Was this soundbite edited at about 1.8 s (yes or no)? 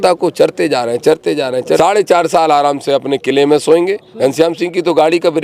yes